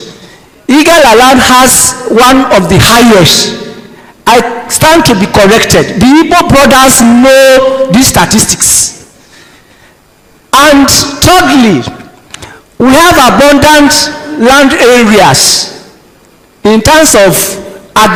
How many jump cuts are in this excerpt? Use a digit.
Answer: 0